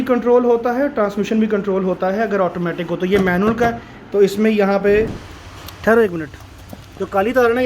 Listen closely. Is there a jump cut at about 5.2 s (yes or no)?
yes